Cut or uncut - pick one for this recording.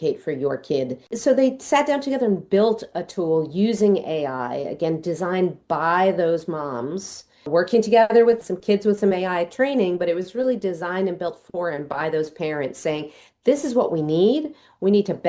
cut